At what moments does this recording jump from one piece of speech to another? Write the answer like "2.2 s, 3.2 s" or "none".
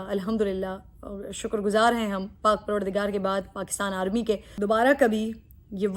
4.5 s